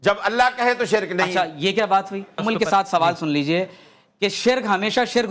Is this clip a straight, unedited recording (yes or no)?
no